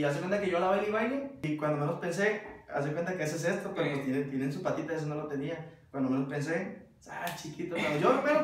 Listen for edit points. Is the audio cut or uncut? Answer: cut